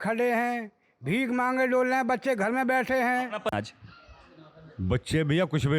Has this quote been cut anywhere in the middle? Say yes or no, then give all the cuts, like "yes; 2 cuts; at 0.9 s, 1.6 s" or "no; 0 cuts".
yes; 1 cut; at 3.5 s